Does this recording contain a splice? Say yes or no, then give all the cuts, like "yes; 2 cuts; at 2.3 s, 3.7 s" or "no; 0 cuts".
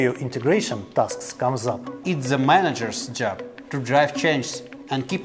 yes; 1 cut; at 2.0 s